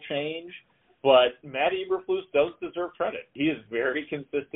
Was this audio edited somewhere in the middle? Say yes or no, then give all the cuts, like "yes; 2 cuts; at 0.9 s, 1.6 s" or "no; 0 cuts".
yes; 2 cuts; at 1.4 s, 3.3 s